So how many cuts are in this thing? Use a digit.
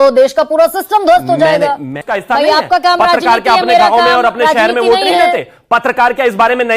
1